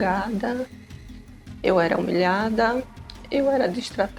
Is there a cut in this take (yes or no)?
no